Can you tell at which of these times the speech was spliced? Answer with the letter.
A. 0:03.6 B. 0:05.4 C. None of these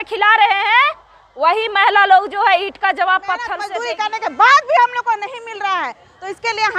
A